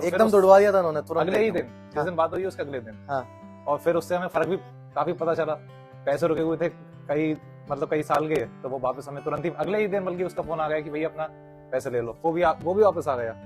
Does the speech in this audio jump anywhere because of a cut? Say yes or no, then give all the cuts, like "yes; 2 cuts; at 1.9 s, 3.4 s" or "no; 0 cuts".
yes; 1 cut; at 12.2 s